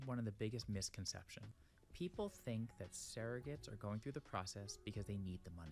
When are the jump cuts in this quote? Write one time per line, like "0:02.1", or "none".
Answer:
0:01.5